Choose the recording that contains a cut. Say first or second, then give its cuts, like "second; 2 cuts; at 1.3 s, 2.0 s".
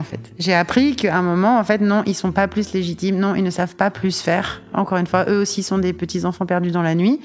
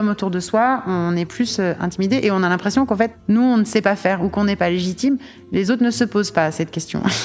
second; 1 cut; at 3.2 s